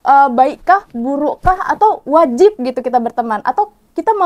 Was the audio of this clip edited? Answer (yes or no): no